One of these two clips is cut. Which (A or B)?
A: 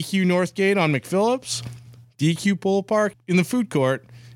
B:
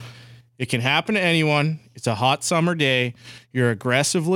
A